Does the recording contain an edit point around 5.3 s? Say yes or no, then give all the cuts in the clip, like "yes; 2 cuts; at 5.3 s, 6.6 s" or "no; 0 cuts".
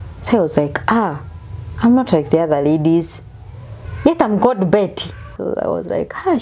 yes; 1 cut; at 5.3 s